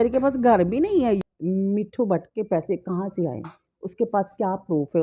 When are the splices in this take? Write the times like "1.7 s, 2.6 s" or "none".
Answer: 1.2 s